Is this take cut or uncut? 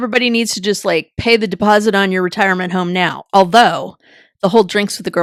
uncut